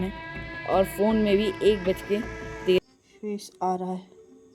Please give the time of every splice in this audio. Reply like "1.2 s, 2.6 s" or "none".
2.8 s